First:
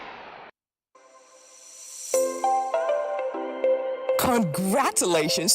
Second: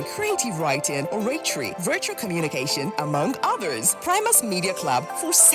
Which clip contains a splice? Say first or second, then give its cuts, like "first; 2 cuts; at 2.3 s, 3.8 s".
first; 1 cut; at 1.0 s